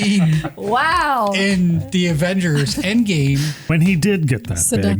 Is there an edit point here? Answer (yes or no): yes